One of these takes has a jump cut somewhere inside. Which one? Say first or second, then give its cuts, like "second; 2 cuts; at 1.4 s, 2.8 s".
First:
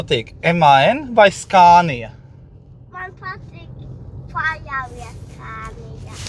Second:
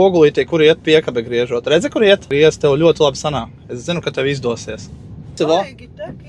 second; 2 cuts; at 2.3 s, 5.3 s